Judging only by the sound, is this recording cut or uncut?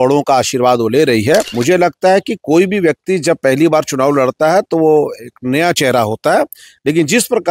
cut